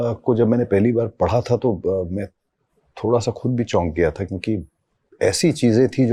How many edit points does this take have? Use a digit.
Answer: 0